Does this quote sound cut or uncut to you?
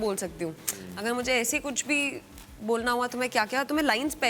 uncut